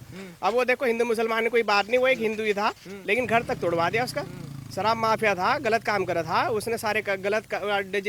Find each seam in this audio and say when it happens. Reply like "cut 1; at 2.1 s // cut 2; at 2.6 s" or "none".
none